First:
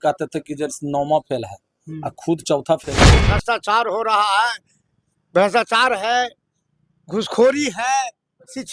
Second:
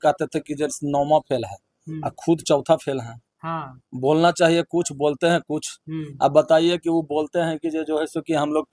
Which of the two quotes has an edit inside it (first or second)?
first